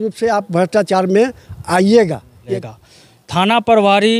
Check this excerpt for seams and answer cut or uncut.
cut